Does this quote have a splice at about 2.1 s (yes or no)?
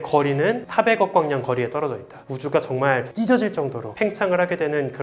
yes